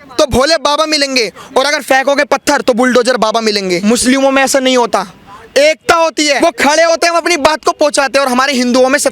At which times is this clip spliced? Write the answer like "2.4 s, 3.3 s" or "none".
3.8 s, 6.4 s